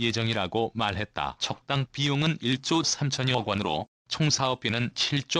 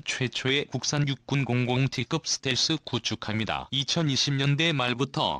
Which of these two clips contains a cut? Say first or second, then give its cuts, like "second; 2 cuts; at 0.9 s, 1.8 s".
first; 2 cuts; at 1.4 s, 4.2 s